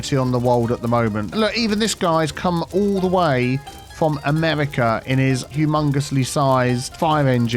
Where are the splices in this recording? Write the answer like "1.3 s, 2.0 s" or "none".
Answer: 1.3 s, 5.5 s